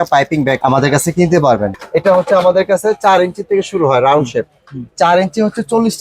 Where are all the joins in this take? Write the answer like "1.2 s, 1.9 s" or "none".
1.8 s